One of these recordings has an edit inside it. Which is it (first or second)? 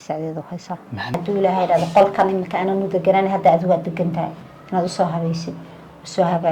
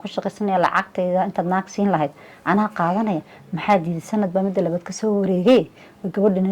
first